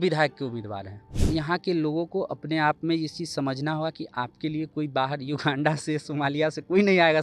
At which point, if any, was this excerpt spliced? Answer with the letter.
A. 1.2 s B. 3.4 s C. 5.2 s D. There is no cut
A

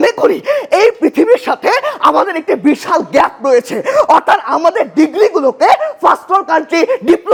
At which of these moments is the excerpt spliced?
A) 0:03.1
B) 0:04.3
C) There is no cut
C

